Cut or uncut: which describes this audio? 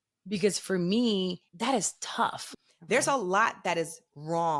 cut